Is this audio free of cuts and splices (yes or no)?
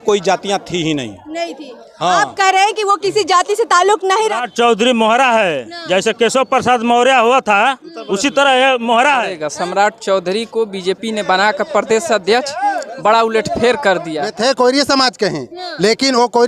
no